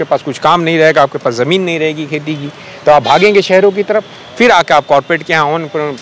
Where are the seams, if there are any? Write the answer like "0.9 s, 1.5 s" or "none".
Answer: none